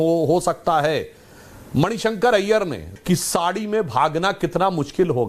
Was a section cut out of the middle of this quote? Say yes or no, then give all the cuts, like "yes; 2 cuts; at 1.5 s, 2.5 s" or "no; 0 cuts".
yes; 1 cut; at 2.9 s